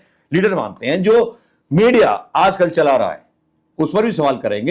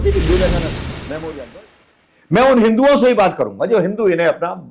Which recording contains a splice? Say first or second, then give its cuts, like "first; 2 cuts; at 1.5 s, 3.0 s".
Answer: second; 1 cut; at 1.6 s